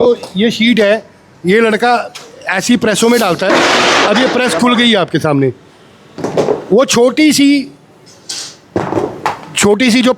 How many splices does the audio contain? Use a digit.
0